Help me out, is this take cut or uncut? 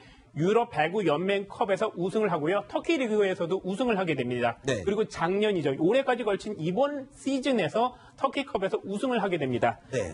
cut